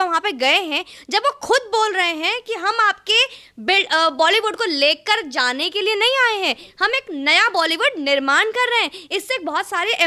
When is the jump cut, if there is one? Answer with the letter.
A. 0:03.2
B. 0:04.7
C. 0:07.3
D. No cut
D